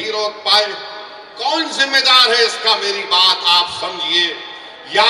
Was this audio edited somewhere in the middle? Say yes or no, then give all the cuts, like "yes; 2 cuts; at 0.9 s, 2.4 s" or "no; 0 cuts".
no; 0 cuts